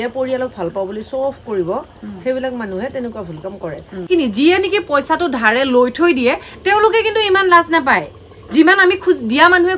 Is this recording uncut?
no; 1 cut; at 4.1 s

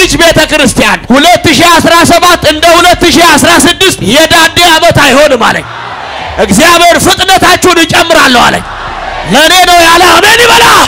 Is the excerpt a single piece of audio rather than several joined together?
no; 2 cuts; at 1.0 s, 4.0 s

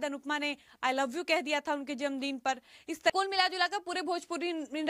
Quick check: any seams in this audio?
no; 0 cuts

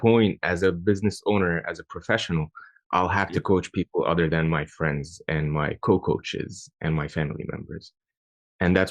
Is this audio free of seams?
yes; 0 cuts

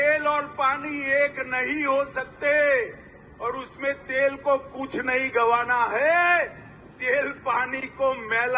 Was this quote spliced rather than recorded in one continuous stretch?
no; 0 cuts

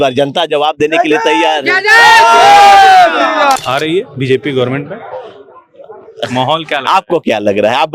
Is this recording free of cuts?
no; 1 cut; at 3.6 s

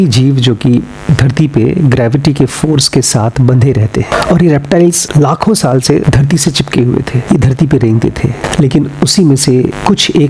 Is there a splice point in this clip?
no; 0 cuts

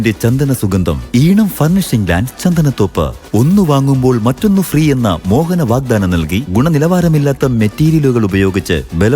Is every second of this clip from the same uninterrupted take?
no; 2 cuts; at 1.0 s, 3.1 s

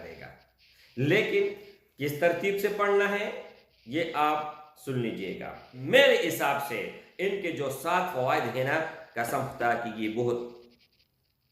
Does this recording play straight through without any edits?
no; 1 cut; at 5.7 s

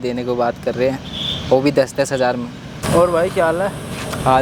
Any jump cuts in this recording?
yes; 1 cut; at 2.8 s

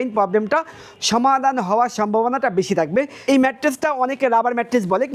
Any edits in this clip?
yes; 1 cut; at 3.2 s

